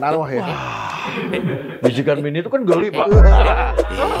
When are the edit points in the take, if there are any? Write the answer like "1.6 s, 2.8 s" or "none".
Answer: none